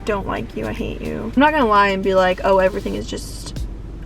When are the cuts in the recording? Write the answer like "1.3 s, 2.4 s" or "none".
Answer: 1.3 s